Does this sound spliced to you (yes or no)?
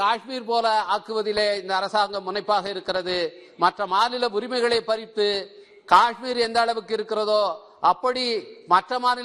no